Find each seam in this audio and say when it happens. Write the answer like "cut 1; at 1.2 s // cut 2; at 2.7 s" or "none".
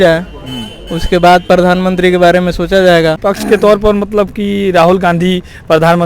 cut 1; at 3.3 s